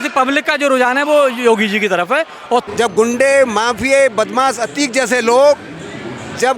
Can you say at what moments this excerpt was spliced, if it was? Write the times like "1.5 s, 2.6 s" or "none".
2.6 s